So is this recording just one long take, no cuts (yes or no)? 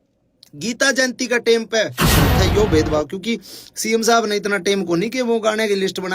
no